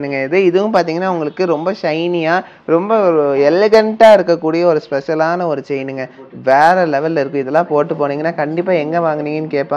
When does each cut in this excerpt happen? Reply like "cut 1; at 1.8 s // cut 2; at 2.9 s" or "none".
none